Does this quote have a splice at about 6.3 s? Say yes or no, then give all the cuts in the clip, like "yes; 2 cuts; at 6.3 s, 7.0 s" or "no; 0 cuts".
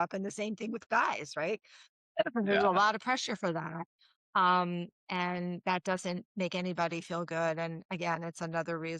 yes; 1 cut; at 6.3 s